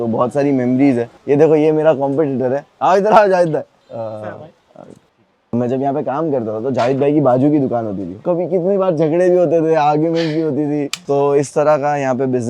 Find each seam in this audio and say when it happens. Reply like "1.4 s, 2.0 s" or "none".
1.2 s, 3.7 s, 5.5 s, 8.2 s, 11.0 s

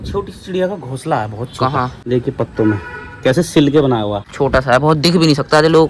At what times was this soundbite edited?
2.0 s, 4.2 s

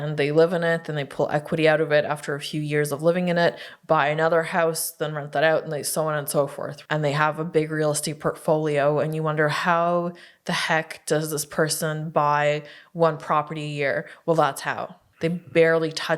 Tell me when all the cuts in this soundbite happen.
6.7 s, 15.0 s

